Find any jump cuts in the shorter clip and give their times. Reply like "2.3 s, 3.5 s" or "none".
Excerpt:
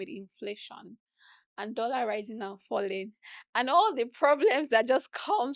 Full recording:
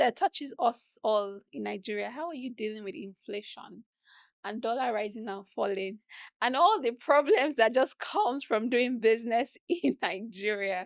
none

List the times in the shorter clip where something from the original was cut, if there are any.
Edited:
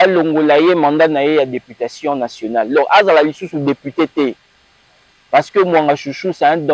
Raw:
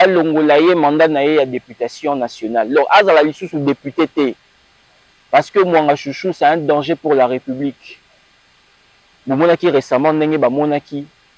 none

